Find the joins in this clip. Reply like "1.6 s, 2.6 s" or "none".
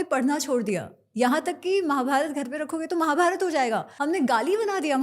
3.9 s